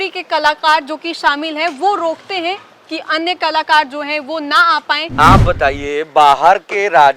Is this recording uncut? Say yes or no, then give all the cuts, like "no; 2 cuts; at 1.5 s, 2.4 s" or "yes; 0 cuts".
no; 1 cut; at 5.1 s